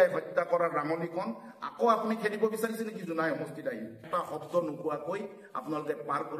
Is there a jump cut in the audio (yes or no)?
yes